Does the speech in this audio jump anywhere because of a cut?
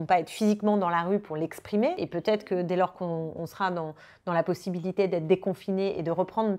yes; 1 cut; at 2.0 s

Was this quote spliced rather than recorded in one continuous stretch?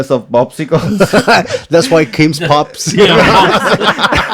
no; 0 cuts

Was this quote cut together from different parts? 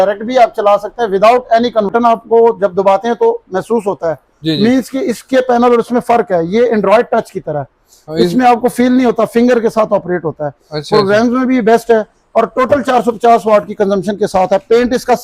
yes; 1 cut; at 1.9 s

